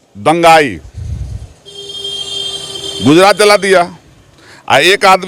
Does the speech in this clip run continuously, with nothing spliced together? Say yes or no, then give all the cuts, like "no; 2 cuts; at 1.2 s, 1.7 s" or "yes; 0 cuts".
yes; 0 cuts